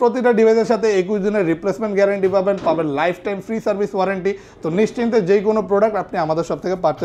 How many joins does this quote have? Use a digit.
0